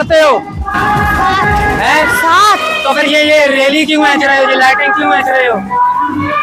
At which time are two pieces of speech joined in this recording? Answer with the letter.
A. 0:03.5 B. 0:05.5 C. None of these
C